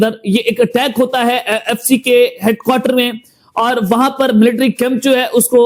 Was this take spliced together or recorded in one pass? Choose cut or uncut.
uncut